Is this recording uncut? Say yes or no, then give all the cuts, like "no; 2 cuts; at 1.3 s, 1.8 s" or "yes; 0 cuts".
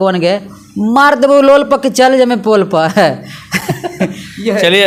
yes; 0 cuts